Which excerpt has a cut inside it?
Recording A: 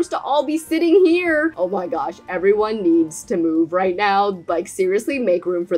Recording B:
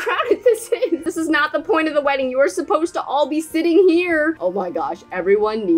B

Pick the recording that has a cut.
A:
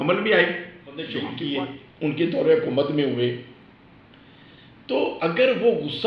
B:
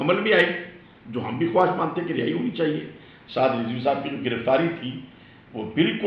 A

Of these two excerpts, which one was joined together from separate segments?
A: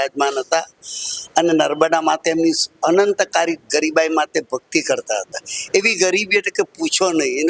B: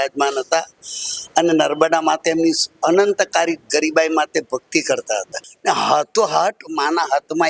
B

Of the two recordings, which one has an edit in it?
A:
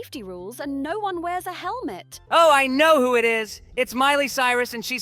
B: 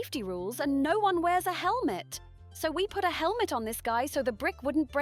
A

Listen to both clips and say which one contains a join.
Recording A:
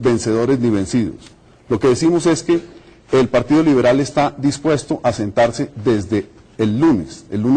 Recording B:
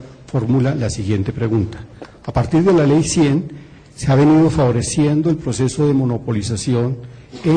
A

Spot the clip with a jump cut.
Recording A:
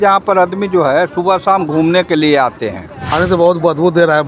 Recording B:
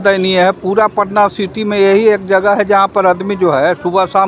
A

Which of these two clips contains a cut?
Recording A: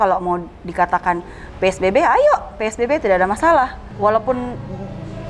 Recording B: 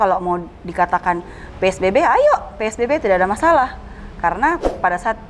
A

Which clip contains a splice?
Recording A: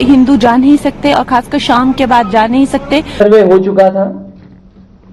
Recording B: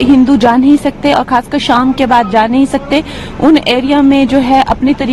A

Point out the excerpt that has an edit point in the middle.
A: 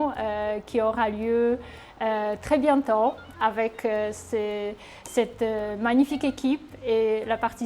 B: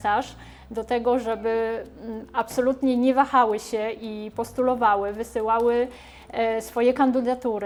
A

